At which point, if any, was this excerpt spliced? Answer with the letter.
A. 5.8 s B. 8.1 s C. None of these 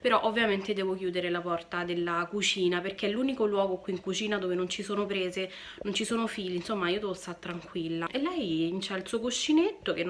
B